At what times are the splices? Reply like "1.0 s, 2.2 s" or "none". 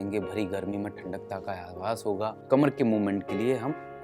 2.4 s

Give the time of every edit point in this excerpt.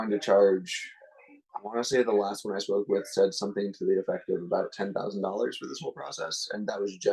none

